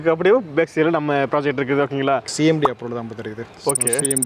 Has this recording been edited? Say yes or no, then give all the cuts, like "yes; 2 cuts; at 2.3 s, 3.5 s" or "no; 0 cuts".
yes; 1 cut; at 2.3 s